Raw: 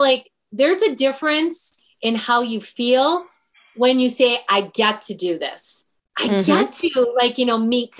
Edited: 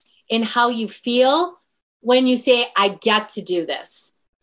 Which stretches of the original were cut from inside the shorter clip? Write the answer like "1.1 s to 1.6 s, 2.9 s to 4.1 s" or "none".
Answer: none